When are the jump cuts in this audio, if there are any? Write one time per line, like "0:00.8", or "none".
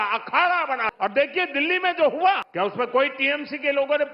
0:00.9
0:02.5